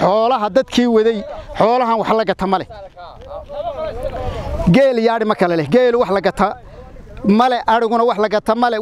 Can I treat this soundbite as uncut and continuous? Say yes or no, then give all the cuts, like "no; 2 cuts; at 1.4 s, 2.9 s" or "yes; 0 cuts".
yes; 0 cuts